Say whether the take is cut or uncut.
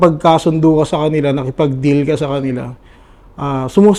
uncut